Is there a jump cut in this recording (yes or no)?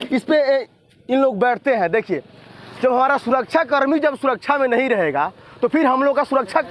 no